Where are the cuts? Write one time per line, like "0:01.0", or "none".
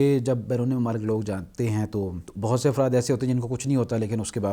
0:02.2